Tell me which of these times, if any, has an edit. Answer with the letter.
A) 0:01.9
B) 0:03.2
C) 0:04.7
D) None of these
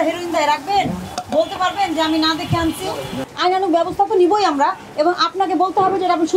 B